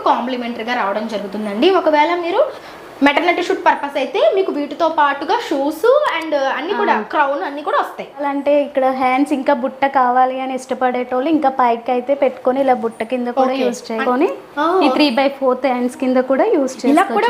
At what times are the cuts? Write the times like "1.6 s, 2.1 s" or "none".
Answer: 2.6 s, 8.2 s, 14.0 s